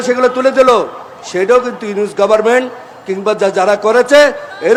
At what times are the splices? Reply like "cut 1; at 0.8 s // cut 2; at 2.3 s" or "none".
none